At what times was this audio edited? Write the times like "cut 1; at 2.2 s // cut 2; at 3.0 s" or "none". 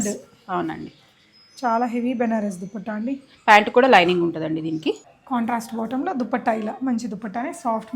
cut 1; at 5.1 s